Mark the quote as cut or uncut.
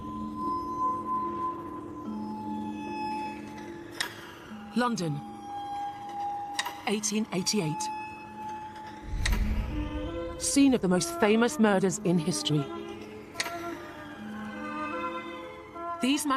uncut